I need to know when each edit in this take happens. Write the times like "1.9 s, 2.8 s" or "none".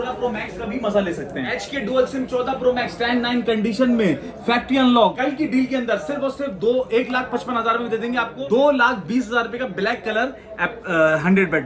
1.5 s, 5.2 s, 8.4 s